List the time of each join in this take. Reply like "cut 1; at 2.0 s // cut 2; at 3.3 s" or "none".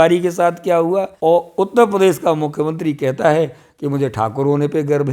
cut 1; at 1.1 s